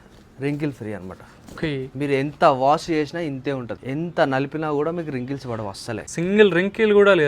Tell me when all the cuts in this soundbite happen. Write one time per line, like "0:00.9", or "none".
0:06.1